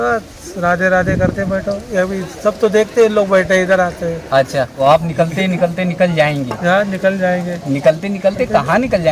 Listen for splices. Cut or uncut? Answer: cut